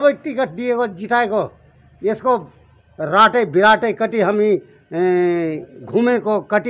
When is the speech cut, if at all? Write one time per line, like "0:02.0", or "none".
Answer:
none